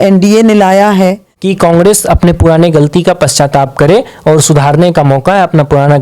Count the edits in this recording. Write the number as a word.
one